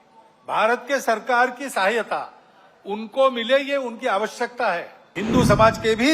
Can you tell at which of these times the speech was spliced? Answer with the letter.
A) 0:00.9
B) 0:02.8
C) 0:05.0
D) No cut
C